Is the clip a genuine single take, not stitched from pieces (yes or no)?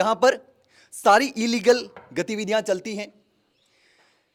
yes